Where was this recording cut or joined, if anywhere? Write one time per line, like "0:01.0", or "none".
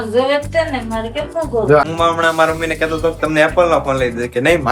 0:01.8